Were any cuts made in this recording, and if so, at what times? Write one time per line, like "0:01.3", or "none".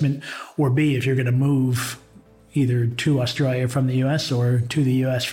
none